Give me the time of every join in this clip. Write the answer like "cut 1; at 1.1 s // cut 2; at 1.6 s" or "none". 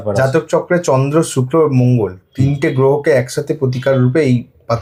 none